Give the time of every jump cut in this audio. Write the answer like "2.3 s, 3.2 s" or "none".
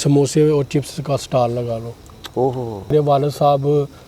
2.9 s